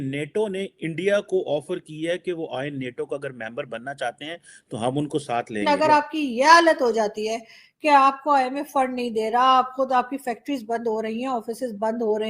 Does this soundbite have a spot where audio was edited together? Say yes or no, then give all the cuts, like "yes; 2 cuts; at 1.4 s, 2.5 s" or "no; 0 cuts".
yes; 1 cut; at 5.6 s